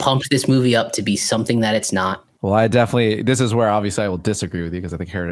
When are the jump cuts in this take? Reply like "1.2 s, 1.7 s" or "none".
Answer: 2.3 s